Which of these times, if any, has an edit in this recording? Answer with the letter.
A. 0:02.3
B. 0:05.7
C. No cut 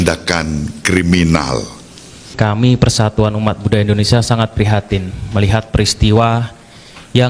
A